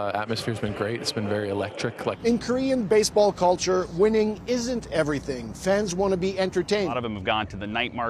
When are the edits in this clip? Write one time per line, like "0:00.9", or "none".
0:02.2
0:07.0